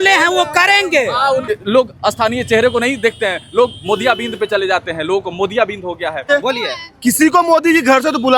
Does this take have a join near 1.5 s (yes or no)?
yes